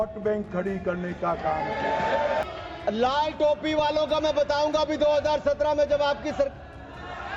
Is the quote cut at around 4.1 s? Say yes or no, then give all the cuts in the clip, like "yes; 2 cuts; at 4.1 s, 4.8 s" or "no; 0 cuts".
no; 1 cut; at 2.4 s